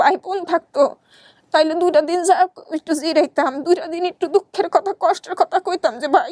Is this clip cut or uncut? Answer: uncut